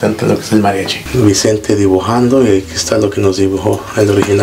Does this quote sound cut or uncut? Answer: cut